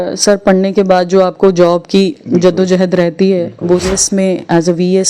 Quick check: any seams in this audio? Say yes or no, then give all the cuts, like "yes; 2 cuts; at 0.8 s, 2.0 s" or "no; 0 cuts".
yes; 1 cut; at 3.8 s